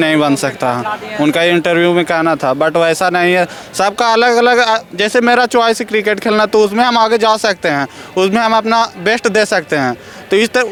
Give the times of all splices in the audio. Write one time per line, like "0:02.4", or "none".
none